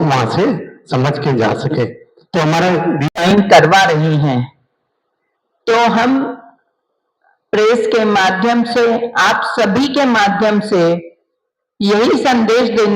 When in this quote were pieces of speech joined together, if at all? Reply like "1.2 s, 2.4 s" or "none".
3.1 s